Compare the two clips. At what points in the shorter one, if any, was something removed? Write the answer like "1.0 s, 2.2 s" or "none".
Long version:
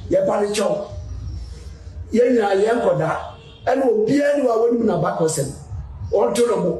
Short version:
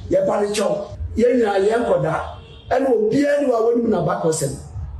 1.0 s